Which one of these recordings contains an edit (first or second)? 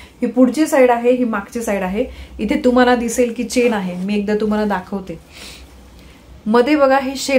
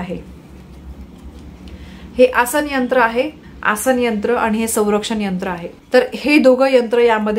second